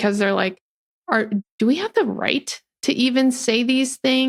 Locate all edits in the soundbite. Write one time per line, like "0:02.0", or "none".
none